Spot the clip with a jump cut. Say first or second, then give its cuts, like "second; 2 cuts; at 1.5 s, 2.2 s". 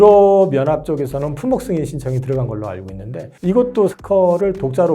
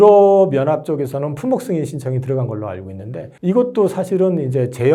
first; 1 cut; at 3.9 s